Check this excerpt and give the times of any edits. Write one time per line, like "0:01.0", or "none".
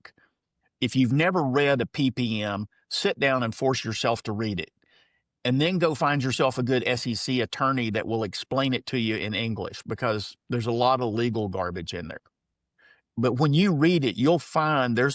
none